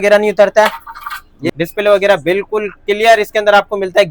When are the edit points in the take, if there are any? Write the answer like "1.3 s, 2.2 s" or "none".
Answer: 1.3 s